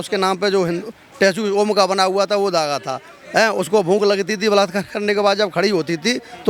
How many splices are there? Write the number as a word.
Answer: zero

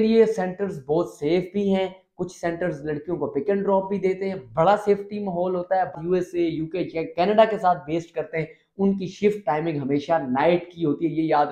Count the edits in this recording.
one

